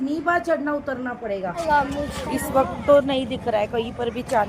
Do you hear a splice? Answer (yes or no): yes